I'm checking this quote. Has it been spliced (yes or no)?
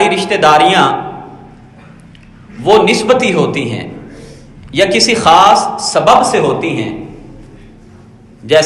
no